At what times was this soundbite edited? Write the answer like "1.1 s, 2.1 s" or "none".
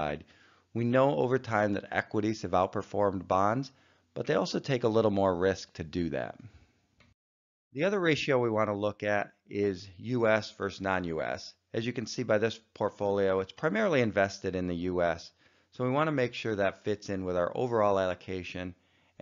none